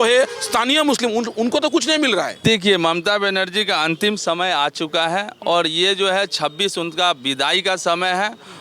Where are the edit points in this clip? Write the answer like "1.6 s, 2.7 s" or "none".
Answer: 2.3 s